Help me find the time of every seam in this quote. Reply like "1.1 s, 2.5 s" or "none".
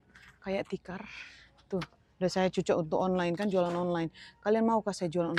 none